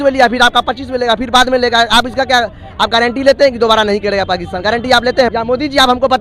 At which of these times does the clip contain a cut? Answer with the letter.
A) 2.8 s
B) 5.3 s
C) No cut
B